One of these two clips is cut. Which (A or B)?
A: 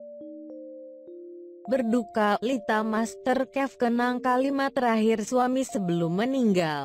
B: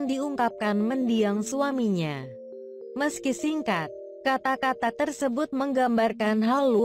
A